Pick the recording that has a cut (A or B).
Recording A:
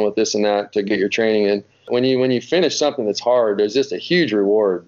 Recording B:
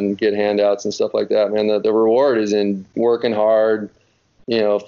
A